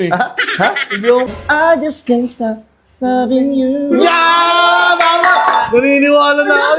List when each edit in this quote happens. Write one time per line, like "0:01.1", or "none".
0:01.3

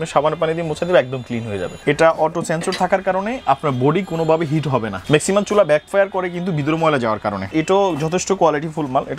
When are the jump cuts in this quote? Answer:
0:01.6
0:05.0
0:07.5

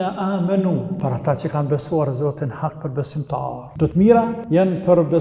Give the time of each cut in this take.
0:01.0
0:03.7
0:04.4

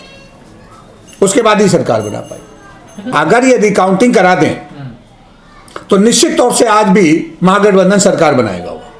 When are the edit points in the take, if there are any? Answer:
0:03.0

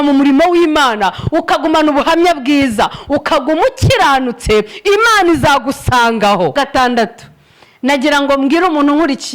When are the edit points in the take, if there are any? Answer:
0:06.5

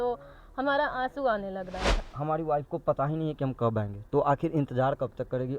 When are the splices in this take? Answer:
0:02.0

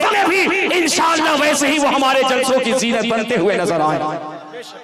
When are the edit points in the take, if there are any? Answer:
none

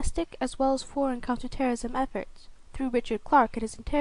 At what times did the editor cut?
none

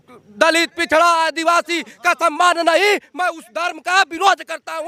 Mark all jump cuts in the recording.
none

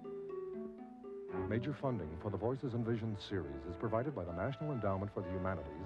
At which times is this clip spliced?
none

